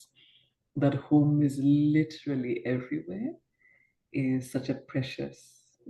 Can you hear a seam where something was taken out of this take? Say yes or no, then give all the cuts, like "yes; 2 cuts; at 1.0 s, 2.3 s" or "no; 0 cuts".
no; 0 cuts